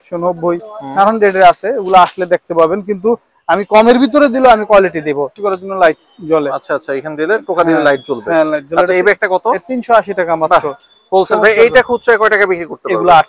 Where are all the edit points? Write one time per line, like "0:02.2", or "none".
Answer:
0:05.3